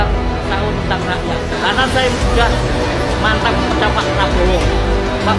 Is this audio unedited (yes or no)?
yes